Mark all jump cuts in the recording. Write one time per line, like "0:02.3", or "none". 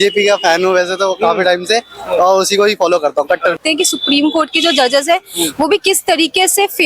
0:03.6